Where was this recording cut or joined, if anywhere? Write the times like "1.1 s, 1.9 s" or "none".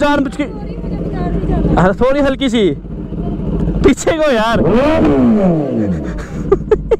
none